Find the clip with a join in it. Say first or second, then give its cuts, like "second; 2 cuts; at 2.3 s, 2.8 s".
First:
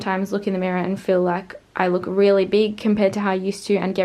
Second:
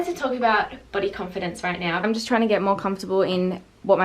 second; 1 cut; at 2.0 s